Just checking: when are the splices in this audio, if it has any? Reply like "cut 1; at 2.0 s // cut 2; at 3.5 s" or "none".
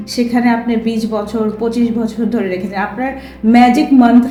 none